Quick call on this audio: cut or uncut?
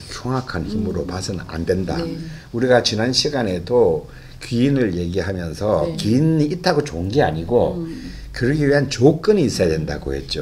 uncut